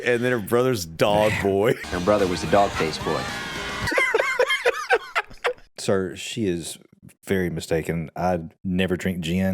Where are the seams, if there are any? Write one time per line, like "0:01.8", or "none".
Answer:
0:03.9
0:05.6